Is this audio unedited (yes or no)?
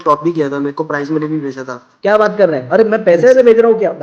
yes